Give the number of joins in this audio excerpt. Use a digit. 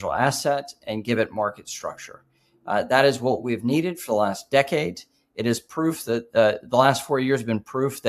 0